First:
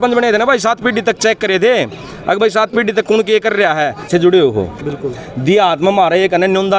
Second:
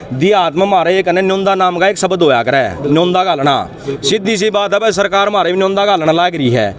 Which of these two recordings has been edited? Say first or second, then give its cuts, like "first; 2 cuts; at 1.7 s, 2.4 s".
first; 1 cut; at 4.1 s